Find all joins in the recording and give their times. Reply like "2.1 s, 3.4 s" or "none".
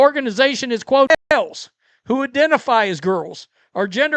1.3 s